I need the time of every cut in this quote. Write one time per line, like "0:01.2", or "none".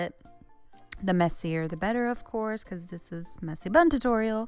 none